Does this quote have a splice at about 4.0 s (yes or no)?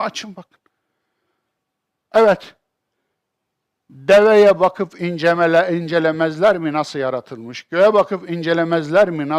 no